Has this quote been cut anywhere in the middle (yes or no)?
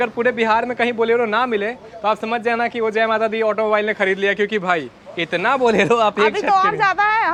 no